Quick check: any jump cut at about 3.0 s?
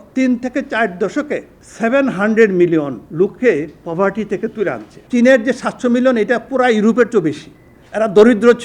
yes; 3 cuts; at 1.6 s, 3.0 s, 5.0 s

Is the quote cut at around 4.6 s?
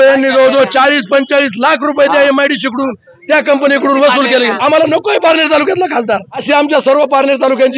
yes; 2 cuts; at 4.6 s, 6.4 s

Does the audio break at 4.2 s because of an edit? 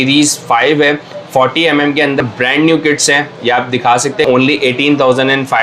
yes; 2 cuts; at 2.2 s, 4.2 s

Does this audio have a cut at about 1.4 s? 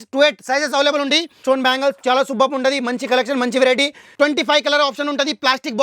yes; 2 cuts; at 1.4 s, 4.1 s

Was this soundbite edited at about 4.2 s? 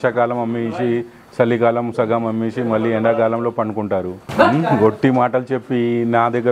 yes; 1 cut; at 4.2 s

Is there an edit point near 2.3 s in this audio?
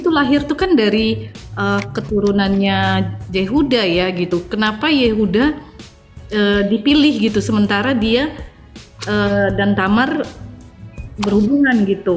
no; 1 cut; at 4.3 s

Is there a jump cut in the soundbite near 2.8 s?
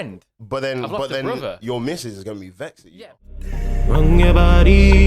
yes; 1 cut; at 2.8 s

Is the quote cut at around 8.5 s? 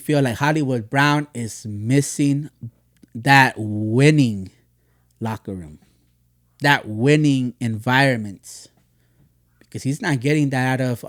no; 0 cuts

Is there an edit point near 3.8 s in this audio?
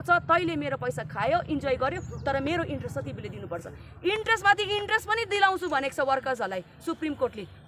no; 0 cuts

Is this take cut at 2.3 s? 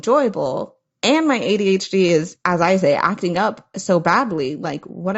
yes; 1 cut; at 2.3 s

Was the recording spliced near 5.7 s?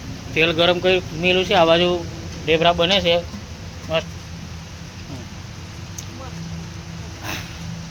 no; 0 cuts

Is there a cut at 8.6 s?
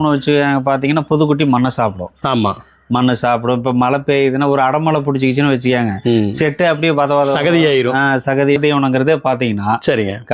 yes; 1 cut; at 8.6 s

